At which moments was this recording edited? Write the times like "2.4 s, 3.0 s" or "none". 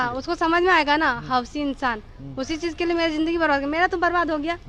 none